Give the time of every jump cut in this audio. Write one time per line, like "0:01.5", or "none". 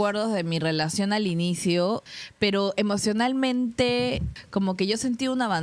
0:02.1
0:04.3